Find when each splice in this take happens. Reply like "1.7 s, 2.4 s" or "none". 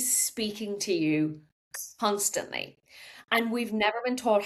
none